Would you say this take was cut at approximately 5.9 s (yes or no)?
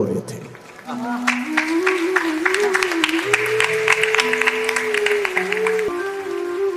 yes